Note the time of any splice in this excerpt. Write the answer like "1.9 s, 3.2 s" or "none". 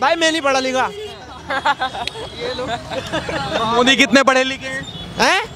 none